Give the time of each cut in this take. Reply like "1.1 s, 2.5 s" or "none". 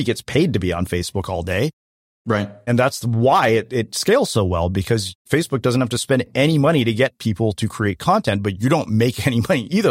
5.3 s